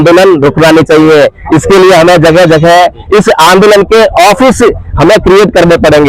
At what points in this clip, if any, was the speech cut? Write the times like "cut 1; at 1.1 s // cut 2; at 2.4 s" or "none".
none